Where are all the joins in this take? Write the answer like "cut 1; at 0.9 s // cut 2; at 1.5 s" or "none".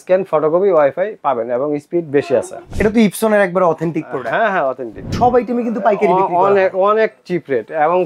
cut 1; at 2.6 s // cut 2; at 5.1 s